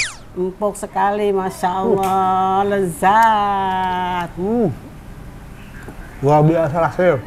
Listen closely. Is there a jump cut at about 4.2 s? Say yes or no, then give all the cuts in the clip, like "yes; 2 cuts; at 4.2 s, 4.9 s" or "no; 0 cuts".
no; 0 cuts